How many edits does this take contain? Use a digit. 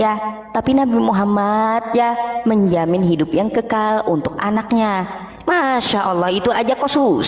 0